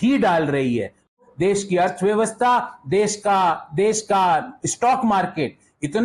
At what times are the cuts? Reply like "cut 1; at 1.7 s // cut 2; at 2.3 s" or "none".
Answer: cut 1; at 1.2 s